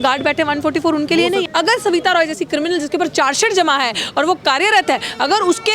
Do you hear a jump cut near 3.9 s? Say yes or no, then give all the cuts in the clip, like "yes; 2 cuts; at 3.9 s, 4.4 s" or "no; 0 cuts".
no; 1 cut; at 1.5 s